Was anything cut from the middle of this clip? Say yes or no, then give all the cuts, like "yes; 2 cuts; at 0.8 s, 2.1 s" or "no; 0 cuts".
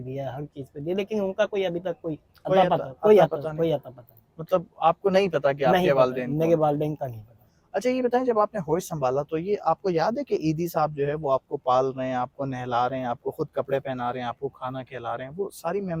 no; 0 cuts